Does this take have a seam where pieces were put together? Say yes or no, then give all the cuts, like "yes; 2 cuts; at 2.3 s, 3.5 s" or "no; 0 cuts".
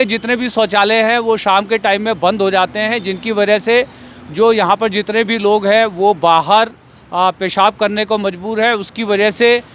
no; 0 cuts